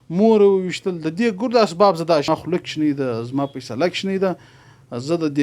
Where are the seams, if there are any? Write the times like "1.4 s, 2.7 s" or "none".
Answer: 2.3 s